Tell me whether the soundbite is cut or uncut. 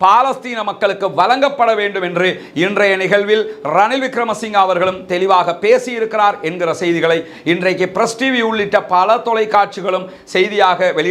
uncut